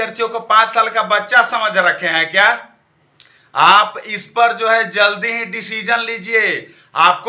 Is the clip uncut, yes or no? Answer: yes